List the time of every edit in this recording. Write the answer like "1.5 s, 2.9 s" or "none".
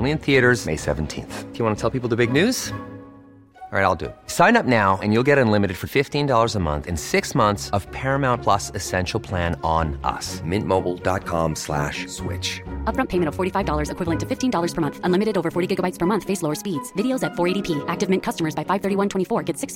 none